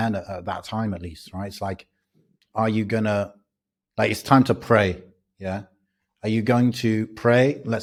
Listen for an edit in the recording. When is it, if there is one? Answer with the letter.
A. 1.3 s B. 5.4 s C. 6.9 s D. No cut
D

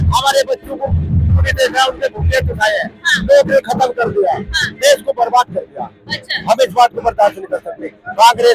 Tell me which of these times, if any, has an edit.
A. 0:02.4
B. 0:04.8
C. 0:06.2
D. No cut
D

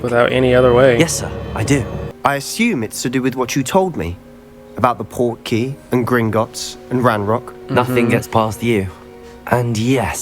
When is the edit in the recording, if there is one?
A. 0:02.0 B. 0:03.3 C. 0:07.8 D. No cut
A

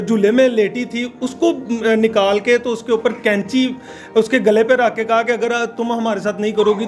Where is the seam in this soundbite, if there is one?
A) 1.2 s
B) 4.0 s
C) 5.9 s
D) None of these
D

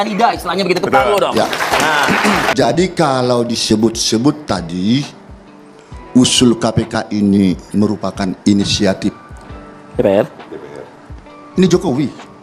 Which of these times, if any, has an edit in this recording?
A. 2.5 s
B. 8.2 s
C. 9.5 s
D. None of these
A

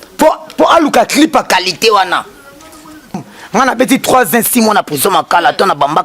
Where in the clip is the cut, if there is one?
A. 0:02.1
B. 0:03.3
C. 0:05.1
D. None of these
B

